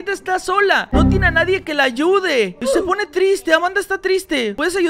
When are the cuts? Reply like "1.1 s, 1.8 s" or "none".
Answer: none